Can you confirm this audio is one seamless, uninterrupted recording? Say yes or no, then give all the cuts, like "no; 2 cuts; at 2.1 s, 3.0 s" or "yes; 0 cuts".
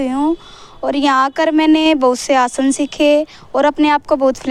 yes; 0 cuts